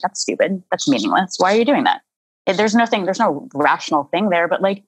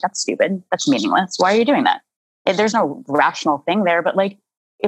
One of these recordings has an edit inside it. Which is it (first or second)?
second